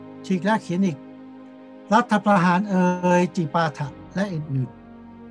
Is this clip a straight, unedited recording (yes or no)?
yes